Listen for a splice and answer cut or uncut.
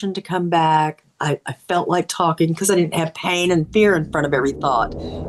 uncut